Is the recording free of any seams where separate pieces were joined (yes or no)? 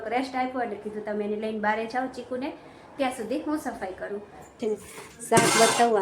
no